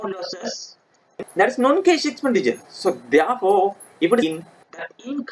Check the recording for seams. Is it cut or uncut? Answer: cut